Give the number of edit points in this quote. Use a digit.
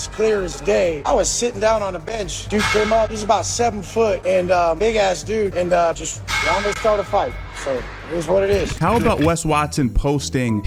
0